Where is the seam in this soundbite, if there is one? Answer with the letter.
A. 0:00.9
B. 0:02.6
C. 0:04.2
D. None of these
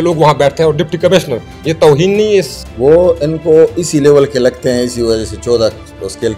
B